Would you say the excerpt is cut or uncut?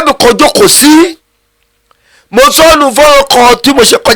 uncut